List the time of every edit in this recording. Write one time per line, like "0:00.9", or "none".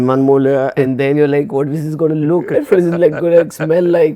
none